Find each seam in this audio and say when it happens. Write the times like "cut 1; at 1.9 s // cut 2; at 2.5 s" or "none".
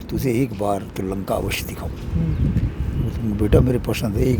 none